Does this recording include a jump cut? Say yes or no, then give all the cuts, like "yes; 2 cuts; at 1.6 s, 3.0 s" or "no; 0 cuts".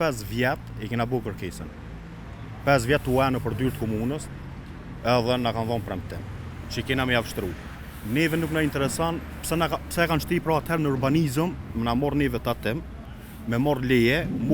no; 0 cuts